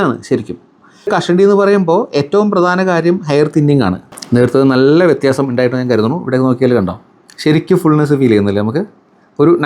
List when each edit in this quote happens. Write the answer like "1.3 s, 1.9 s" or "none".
1.1 s, 4.1 s